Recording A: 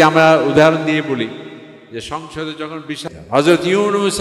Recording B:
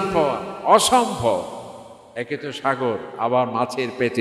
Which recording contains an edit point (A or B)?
A